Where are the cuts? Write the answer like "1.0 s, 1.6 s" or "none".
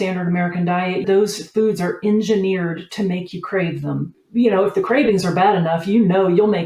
1.0 s, 4.2 s